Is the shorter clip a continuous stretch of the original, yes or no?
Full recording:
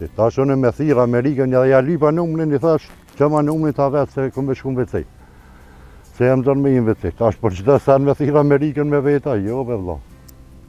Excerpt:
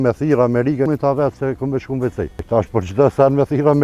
no